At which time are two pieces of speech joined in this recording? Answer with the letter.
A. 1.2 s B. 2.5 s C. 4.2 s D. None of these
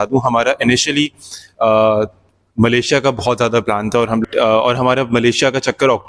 C